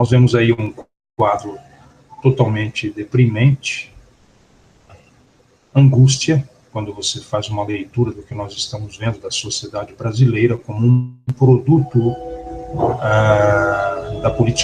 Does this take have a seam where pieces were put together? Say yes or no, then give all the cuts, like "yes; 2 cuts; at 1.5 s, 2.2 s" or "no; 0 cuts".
no; 0 cuts